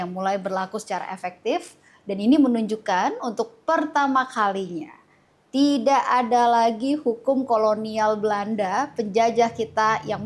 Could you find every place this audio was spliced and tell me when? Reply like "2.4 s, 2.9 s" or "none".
none